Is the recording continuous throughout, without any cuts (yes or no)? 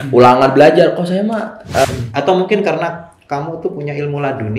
no